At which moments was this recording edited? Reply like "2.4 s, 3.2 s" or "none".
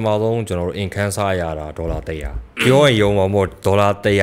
none

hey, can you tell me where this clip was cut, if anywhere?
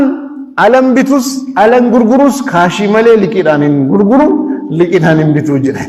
none

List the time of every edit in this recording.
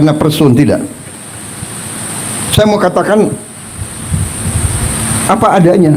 none

